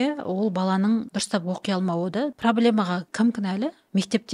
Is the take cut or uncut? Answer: cut